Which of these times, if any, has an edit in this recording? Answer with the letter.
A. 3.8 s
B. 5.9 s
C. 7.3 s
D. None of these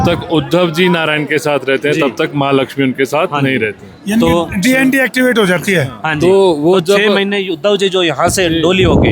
D